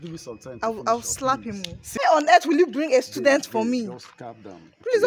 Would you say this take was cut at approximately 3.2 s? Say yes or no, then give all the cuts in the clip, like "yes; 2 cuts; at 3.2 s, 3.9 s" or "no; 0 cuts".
no; 1 cut; at 2.0 s